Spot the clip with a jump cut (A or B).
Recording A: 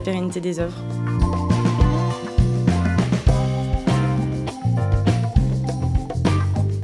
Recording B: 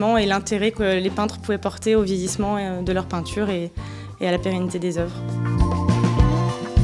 A